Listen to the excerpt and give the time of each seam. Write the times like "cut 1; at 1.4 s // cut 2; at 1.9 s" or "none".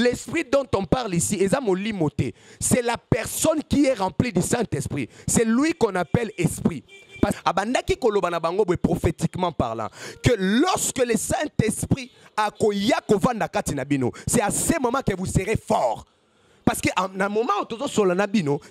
cut 1; at 7.4 s